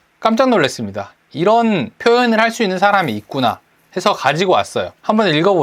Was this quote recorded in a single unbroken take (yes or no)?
yes